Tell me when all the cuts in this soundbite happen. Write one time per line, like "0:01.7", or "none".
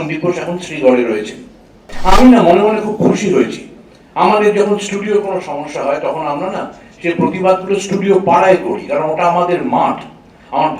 0:01.9